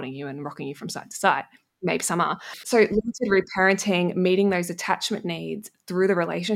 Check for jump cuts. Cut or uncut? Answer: cut